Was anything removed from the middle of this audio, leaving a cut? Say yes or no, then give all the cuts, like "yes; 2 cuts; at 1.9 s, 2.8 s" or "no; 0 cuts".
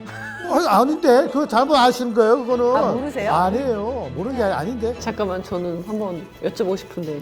yes; 1 cut; at 5.0 s